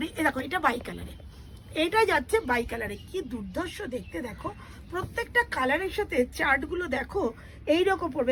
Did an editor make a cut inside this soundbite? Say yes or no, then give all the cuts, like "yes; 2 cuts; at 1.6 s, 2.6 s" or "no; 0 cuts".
no; 0 cuts